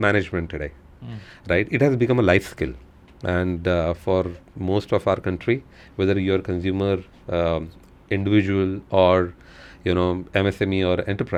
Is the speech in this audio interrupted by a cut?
no; 0 cuts

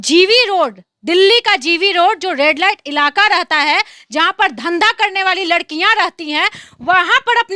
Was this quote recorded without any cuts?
yes; 0 cuts

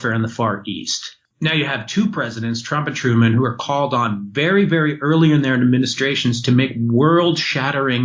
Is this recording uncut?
no; 1 cut; at 1.3 s

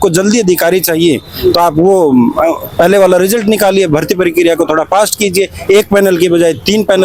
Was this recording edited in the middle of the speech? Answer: no; 0 cuts

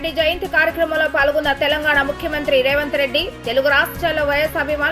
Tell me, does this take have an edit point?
no; 0 cuts

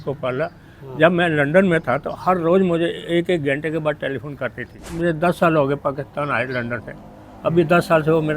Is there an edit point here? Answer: yes; 1 cut; at 5.0 s

